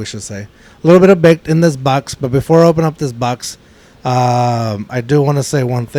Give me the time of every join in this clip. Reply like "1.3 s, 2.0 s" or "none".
none